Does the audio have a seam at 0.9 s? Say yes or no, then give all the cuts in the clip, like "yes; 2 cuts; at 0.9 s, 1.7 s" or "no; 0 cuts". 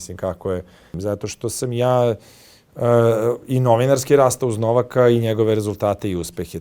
yes; 1 cut; at 0.9 s